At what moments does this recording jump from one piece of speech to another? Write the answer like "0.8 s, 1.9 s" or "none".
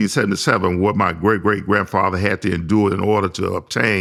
none